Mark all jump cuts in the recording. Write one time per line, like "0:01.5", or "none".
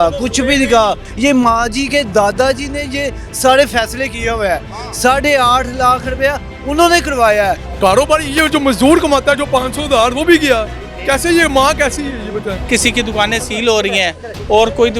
0:01.1
0:07.7
0:12.6